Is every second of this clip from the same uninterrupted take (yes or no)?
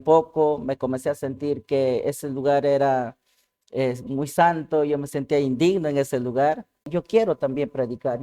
no